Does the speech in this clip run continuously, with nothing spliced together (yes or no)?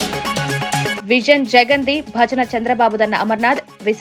yes